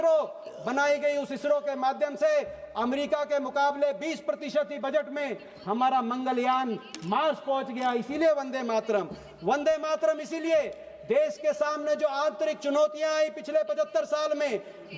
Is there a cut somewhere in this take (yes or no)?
no